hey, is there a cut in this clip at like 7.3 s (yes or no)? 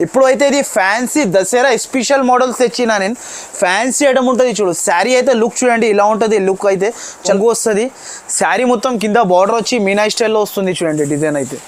yes